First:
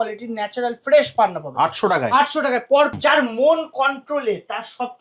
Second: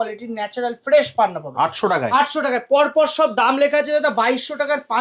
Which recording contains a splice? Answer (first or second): first